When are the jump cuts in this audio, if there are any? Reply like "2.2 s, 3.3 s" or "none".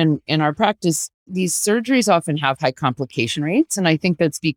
1.3 s